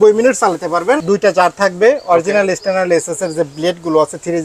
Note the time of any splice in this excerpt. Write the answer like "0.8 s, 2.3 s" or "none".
1.0 s